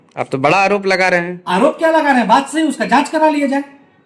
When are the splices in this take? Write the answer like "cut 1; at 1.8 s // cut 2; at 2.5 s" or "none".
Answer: none